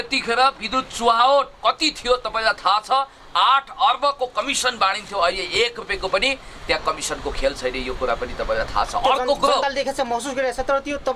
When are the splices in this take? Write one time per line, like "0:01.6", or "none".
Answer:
none